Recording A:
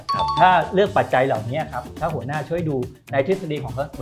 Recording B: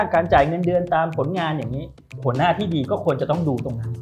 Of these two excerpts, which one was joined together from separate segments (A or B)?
B